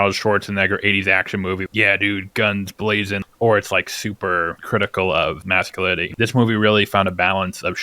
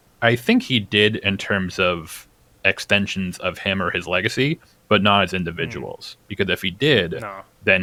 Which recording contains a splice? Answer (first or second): first